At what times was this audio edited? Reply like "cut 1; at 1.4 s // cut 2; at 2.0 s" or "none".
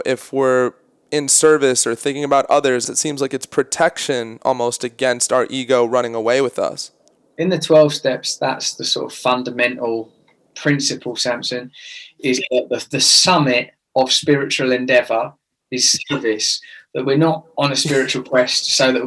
cut 1; at 2.8 s